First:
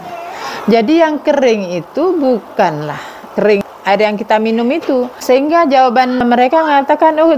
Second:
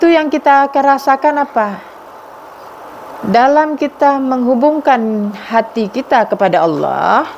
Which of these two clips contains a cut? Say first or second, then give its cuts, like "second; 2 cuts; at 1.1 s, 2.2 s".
first; 3 cuts; at 3.7 s, 5.2 s, 6.2 s